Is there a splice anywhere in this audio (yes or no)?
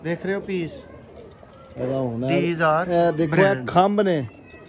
no